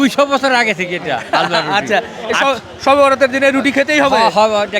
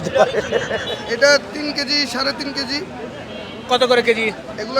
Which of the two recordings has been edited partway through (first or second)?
second